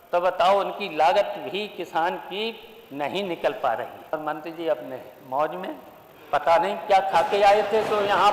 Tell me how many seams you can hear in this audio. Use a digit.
1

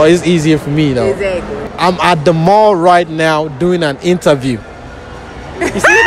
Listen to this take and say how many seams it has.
1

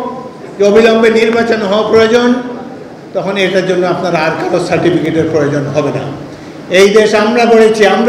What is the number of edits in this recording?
0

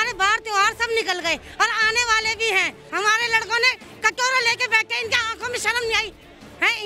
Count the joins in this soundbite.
1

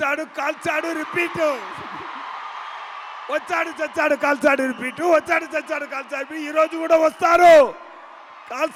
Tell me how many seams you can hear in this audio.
0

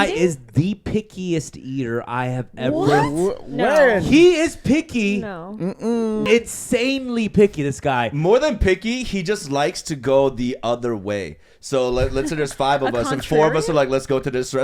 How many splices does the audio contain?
1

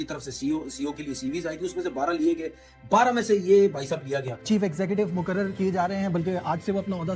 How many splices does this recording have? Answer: 1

